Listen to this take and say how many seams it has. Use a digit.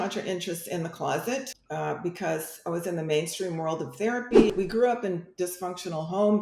2